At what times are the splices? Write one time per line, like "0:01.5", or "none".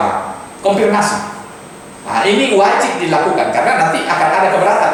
none